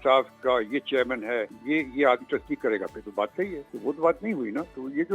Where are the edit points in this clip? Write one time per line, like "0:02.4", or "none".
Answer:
0:01.5
0:03.7